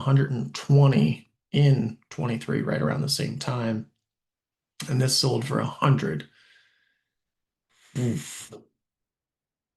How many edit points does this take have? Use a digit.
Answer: 0